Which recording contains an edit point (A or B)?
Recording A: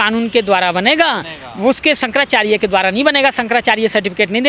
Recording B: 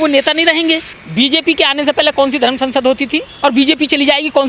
B